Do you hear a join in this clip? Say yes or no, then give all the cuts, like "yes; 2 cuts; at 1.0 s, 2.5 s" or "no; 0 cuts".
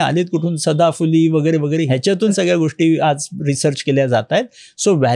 yes; 1 cut; at 2.3 s